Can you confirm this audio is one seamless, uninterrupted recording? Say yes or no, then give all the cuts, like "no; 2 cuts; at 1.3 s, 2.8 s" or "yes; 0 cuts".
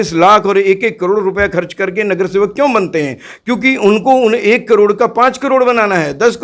yes; 0 cuts